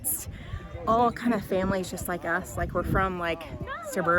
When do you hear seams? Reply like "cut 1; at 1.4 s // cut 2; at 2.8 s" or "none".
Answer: none